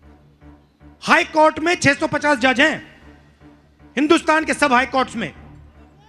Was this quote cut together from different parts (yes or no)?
yes